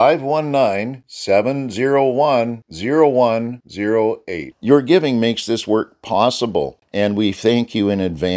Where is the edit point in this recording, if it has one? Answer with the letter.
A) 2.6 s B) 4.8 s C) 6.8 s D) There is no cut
C